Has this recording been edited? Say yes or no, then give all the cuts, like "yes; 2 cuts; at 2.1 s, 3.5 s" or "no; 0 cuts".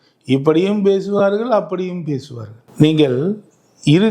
no; 0 cuts